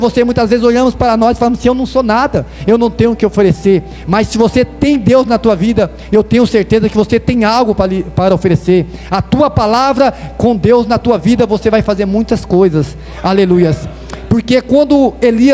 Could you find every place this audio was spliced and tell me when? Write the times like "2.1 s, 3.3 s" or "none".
none